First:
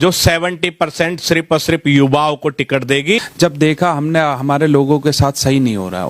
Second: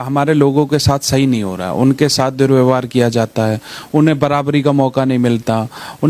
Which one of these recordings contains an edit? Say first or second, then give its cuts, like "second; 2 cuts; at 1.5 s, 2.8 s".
first; 1 cut; at 3.2 s